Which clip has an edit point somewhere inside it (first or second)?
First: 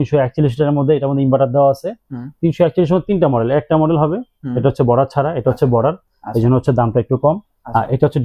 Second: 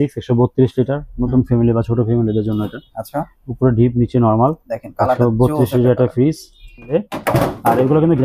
second